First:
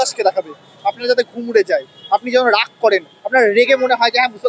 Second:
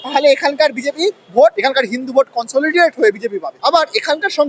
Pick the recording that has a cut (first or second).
second